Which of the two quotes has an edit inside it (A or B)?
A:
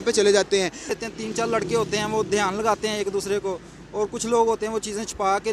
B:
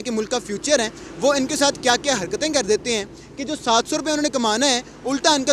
A